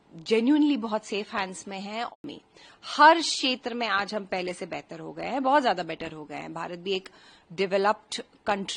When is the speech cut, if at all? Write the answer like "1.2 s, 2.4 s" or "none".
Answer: 2.1 s